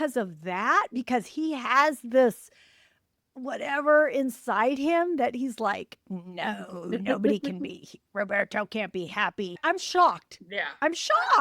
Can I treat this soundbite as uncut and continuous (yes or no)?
no